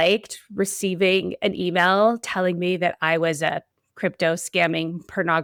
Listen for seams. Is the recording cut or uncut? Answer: uncut